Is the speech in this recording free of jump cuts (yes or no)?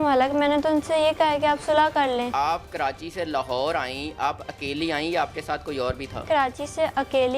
no